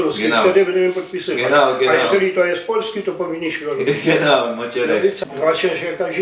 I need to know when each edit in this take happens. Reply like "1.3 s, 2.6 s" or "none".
5.2 s